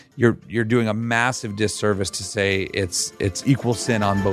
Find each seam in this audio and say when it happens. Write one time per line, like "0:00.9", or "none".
0:03.4